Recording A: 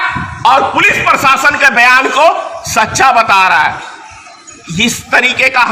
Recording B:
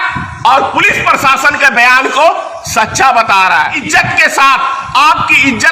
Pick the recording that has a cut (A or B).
B